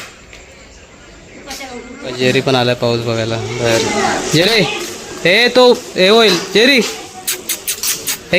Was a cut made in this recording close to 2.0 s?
yes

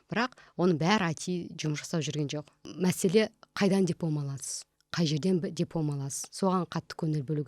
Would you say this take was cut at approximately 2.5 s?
yes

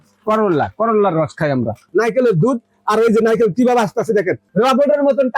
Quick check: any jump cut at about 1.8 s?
yes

